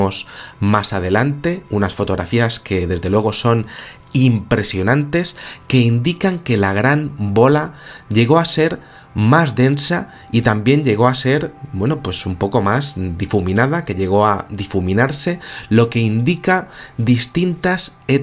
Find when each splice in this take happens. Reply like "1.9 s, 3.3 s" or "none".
5.0 s